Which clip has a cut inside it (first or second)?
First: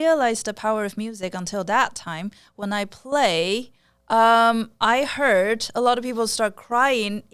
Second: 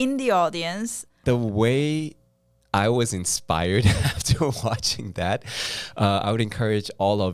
second